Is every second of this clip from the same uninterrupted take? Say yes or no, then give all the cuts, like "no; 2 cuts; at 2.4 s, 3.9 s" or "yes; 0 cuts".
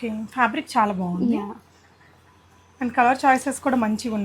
yes; 0 cuts